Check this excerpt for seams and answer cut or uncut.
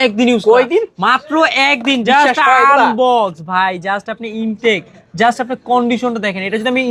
uncut